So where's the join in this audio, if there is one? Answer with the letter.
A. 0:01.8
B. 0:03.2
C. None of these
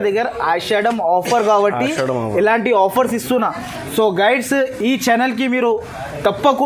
C